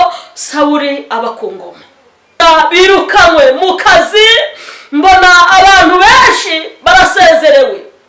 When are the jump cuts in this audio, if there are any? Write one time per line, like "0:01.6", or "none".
0:02.4

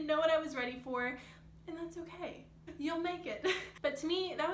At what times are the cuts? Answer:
0:02.6
0:03.7

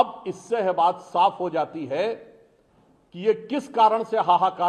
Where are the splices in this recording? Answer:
none

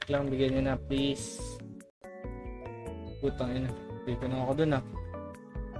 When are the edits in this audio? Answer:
0:02.0

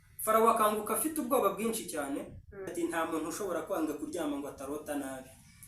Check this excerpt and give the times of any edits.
0:02.7

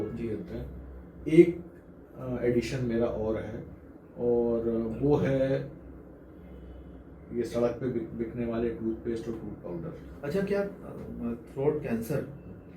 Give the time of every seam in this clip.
0:10.1

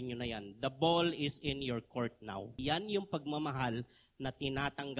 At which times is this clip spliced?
0:02.6

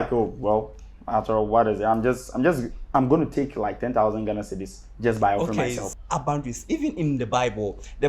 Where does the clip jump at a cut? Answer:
0:05.9

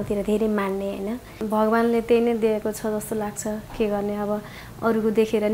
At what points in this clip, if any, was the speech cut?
0:01.4

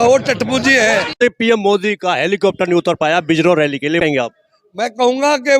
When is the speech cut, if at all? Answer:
0:01.2
0:04.0

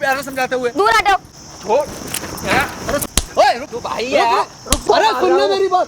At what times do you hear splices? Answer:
0:01.4
0:03.1
0:04.6

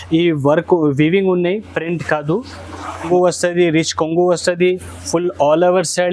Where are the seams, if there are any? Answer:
0:03.0

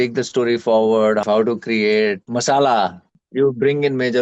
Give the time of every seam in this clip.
0:01.2
0:02.2
0:03.2

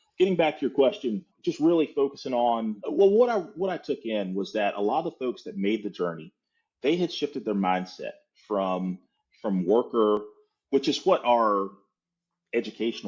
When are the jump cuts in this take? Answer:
0:01.3
0:02.7

